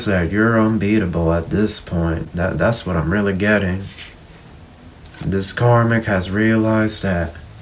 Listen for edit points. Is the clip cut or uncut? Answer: uncut